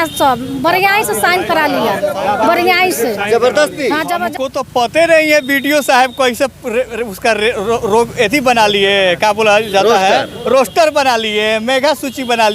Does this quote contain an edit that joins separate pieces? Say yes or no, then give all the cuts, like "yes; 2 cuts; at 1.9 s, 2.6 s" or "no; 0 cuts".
yes; 1 cut; at 4.3 s